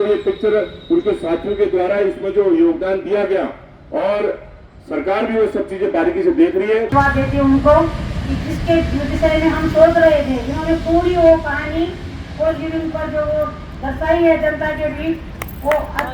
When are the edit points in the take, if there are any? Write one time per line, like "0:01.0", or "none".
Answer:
0:06.9